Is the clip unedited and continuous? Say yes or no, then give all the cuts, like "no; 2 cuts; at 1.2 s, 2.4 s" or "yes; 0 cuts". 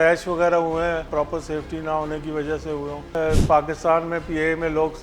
no; 2 cuts; at 1.1 s, 3.1 s